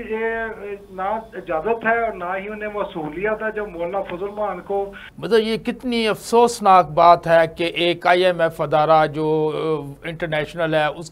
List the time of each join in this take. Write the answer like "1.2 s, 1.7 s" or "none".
5.1 s

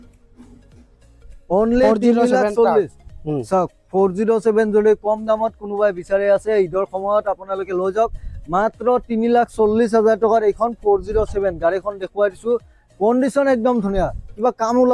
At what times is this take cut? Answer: none

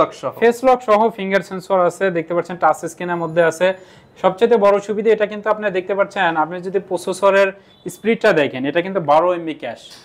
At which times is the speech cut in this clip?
none

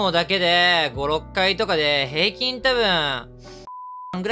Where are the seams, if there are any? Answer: none

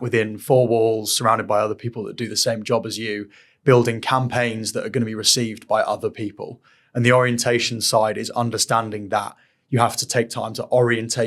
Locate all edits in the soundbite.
none

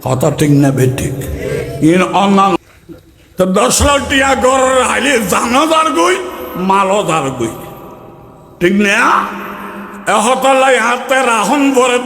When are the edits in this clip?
2.6 s

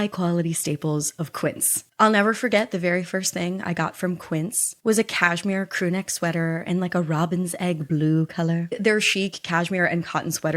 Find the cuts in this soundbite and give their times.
1.7 s, 8.7 s

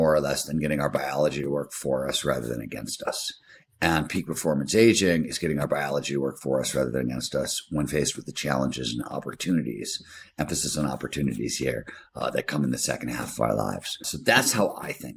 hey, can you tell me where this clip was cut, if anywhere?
14.1 s

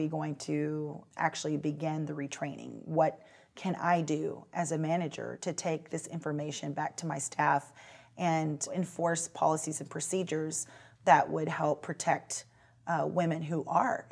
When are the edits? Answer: 1.0 s, 8.7 s

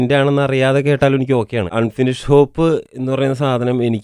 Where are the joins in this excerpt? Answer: 1.7 s, 2.9 s

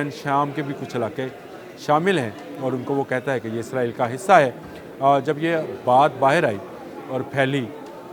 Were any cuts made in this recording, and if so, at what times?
none

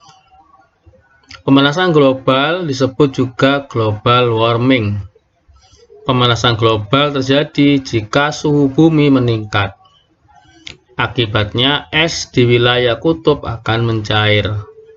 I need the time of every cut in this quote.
none

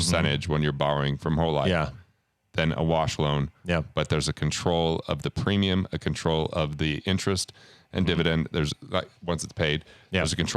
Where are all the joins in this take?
none

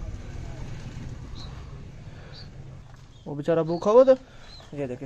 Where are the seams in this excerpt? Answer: 2.8 s

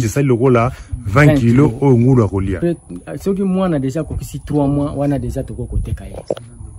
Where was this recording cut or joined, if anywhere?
2.6 s

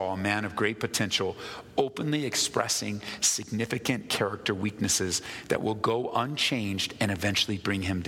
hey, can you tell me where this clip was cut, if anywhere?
none

